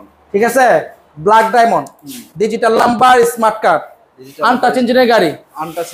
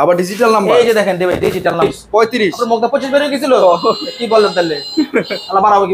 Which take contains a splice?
second; 1 cut; at 1.8 s

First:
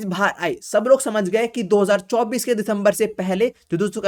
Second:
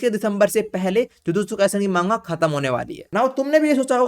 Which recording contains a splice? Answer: second; 1 cut; at 3.0 s

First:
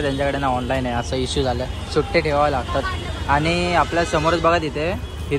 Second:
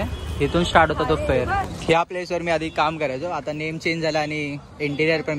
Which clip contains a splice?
second; 1 cut; at 1.6 s

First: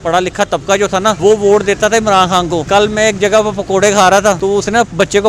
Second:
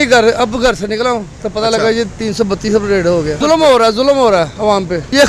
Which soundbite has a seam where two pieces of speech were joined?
first; 3 cuts; at 1.2 s, 2.6 s, 4.4 s

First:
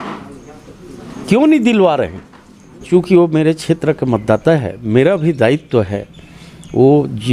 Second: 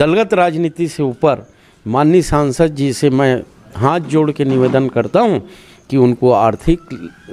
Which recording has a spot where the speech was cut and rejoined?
first; 1 cut; at 2.7 s

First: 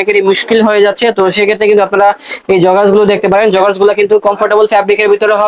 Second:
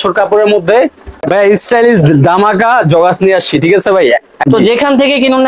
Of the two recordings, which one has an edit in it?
second; 2 cuts; at 1.1 s, 4.3 s

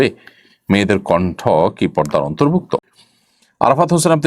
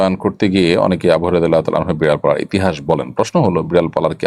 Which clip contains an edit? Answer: first; 1 cut; at 2.8 s

